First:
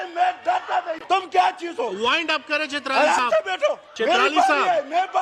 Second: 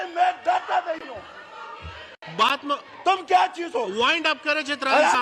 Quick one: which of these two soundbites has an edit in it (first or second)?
first